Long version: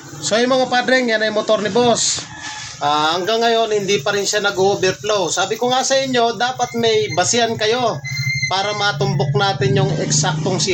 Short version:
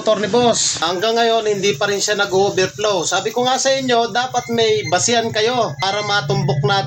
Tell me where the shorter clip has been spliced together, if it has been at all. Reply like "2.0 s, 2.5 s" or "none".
0.8 s, 5.8 s